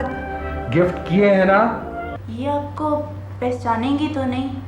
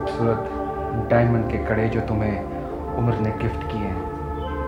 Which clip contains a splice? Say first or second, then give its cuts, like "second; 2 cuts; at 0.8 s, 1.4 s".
first; 1 cut; at 2.2 s